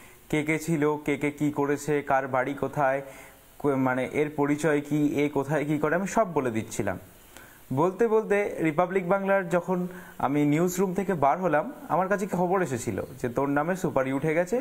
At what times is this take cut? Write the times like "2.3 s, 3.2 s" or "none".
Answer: none